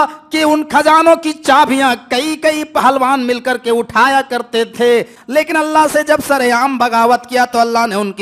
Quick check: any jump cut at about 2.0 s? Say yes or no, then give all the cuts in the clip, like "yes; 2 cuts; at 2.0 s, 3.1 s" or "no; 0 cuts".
no; 1 cut; at 5.2 s